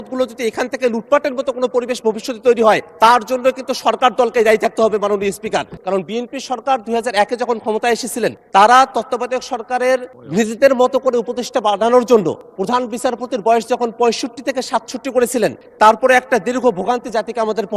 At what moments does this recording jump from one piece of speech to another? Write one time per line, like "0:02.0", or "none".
0:02.9
0:05.7
0:08.4
0:12.5
0:15.6